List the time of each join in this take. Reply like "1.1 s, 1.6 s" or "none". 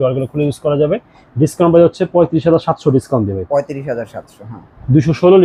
none